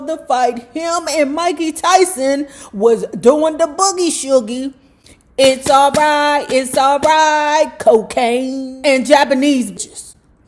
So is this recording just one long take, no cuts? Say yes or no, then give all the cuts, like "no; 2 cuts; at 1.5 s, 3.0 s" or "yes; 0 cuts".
no; 2 cuts; at 8.6 s, 9.7 s